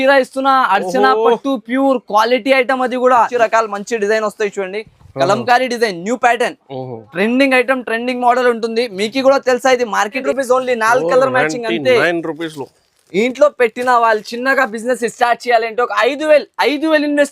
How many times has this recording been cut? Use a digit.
2